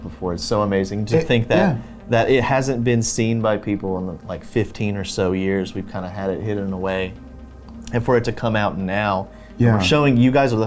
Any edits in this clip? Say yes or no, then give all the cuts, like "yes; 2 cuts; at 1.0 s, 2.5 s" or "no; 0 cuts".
no; 0 cuts